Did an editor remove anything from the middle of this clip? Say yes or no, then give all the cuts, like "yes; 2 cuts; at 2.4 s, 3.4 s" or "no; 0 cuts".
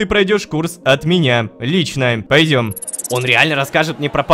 yes; 2 cuts; at 2.2 s, 2.9 s